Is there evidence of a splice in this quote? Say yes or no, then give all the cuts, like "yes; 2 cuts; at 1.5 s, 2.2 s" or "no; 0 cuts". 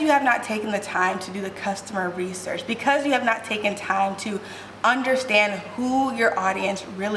no; 0 cuts